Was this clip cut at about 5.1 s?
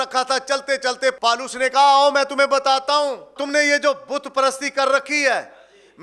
no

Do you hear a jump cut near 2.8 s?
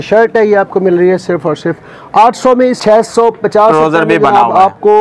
yes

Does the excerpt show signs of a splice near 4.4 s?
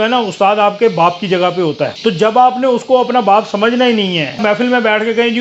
yes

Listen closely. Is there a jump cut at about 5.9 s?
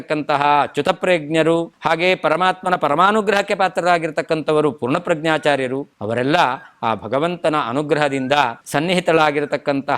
yes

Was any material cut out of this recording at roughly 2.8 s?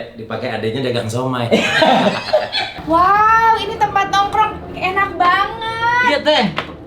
yes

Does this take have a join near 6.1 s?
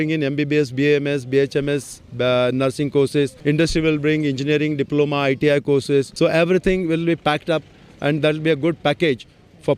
yes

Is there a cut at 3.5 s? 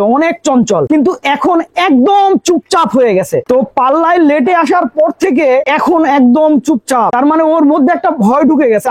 no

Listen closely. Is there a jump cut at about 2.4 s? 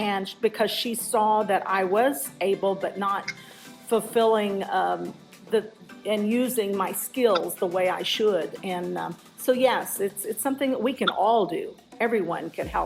no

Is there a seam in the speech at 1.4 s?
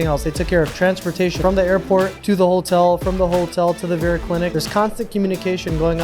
yes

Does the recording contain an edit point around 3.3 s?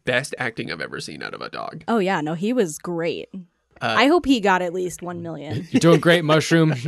no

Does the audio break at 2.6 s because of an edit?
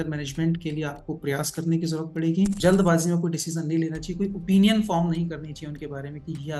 yes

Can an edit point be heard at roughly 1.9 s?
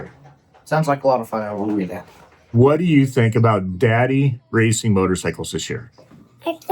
yes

